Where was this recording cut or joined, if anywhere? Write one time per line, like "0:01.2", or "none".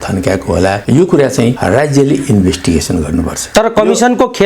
0:00.8
0:01.6
0:03.4